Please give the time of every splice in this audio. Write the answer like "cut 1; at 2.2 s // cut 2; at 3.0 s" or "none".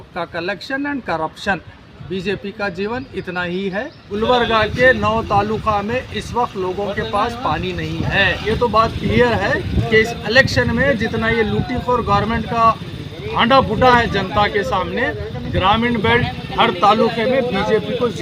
cut 1; at 4.0 s // cut 2; at 8.5 s